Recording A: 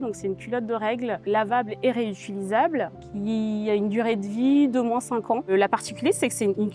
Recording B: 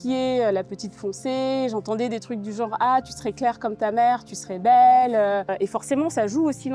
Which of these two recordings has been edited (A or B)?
A